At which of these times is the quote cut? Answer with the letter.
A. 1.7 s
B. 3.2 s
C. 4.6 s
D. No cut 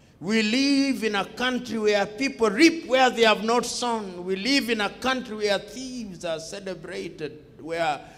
D